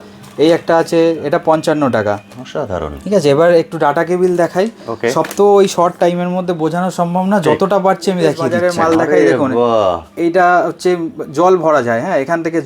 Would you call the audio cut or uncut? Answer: cut